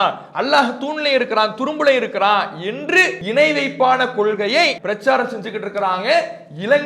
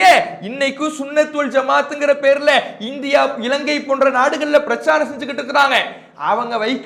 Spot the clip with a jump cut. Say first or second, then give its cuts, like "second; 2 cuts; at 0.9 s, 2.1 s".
first; 2 cuts; at 3.2 s, 4.8 s